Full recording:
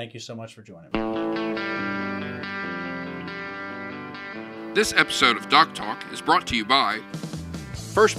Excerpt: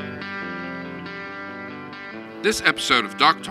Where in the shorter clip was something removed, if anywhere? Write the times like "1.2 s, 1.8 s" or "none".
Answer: 2.4 s